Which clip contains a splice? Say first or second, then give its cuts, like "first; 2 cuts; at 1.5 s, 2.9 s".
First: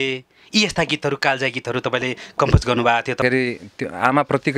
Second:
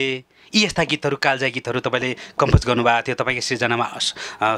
first; 1 cut; at 3.2 s